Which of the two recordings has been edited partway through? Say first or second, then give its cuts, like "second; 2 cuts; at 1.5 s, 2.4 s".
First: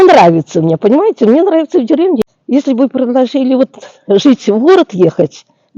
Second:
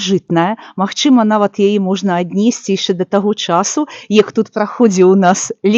first; 1 cut; at 2.2 s